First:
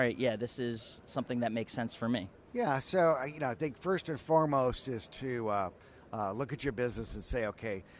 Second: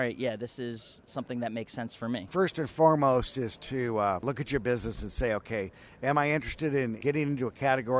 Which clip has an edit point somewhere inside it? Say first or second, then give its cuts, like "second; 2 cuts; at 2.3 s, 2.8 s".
second; 3 cuts; at 2.3 s, 4.2 s, 7.0 s